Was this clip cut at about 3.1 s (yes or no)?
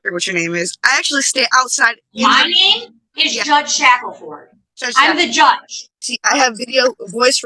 no